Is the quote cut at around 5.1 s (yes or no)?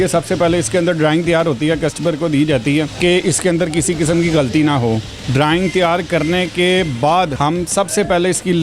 yes